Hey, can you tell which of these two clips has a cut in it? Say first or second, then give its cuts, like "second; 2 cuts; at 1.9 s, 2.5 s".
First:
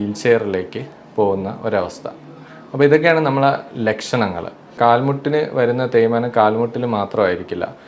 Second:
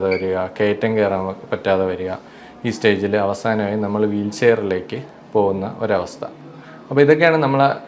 first; 1 cut; at 4.8 s